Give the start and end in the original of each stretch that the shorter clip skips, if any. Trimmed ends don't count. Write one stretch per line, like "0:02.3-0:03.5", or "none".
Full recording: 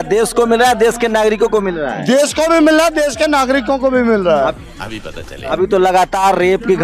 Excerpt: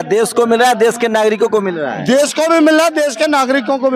none